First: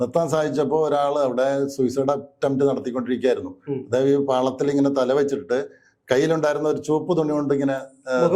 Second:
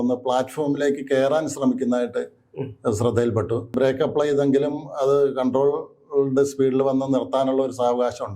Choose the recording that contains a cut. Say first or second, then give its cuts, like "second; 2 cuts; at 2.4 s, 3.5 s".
second; 1 cut; at 3.7 s